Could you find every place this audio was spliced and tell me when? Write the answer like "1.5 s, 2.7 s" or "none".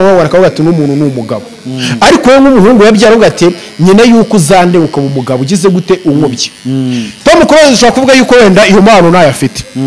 none